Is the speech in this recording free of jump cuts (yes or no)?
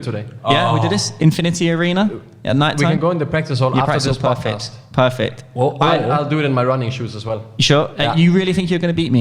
yes